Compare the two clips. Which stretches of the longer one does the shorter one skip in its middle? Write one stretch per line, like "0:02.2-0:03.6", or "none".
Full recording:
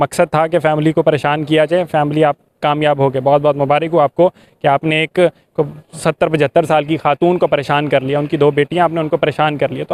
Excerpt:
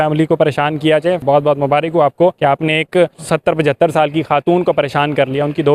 0:01.9-0:03.2
0:04.3-0:04.6
0:05.4-0:05.9

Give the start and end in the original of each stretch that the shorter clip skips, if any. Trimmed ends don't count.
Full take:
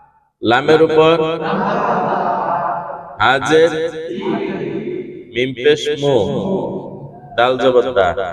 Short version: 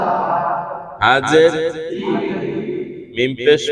none

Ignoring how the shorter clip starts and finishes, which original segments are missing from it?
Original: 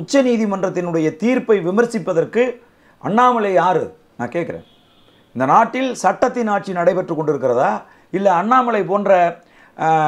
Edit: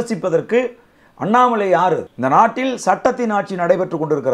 0:03.9-0:05.3

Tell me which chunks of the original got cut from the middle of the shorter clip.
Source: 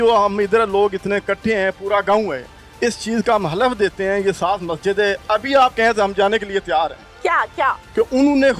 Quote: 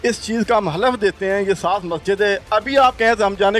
none

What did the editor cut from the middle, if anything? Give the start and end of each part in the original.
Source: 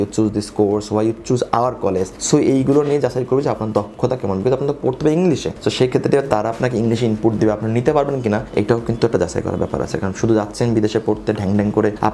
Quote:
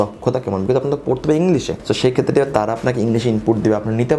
none

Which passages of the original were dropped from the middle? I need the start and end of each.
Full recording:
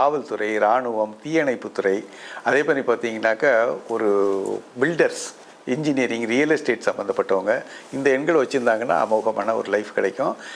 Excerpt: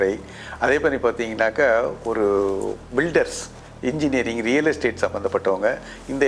none

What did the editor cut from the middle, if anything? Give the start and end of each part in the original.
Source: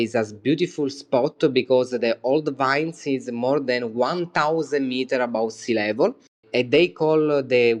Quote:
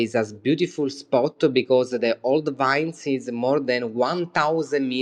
none

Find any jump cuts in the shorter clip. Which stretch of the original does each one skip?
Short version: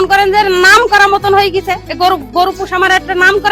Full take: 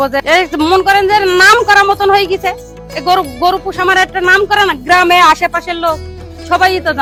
0:02.6-0:02.9

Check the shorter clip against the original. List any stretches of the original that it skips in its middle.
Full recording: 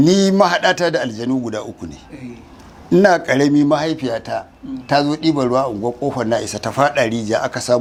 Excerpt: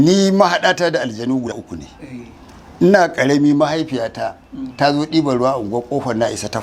0:01.6-0:01.8

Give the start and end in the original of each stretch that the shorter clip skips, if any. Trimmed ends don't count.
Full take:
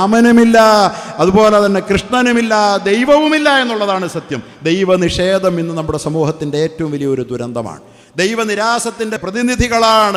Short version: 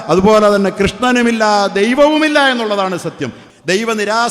0:04.4-0:07.8

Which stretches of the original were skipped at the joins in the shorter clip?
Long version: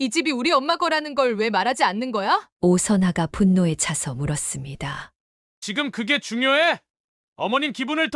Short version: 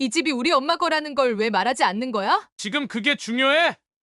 0:02.5-0:05.5

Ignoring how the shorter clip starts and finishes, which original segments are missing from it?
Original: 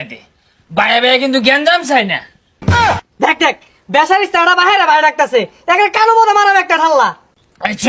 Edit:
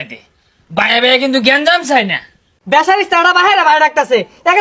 0:02.5-0:03.7

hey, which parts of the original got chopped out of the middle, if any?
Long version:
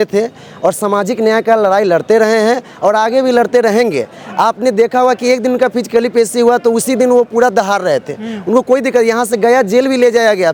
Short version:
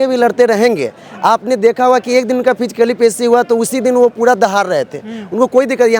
none

